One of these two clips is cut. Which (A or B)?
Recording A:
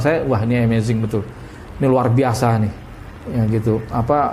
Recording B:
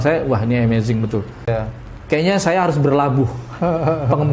B